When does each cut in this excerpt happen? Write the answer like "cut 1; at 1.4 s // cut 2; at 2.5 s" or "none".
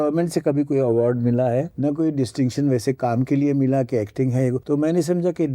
cut 1; at 1.7 s // cut 2; at 4.6 s